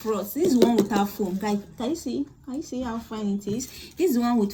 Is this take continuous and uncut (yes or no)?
yes